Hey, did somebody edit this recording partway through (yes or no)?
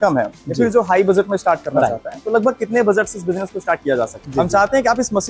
yes